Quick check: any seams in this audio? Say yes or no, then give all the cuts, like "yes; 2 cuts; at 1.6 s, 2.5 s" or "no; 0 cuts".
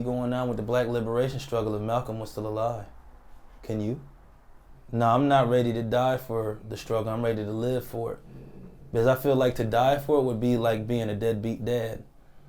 yes; 1 cut; at 4.8 s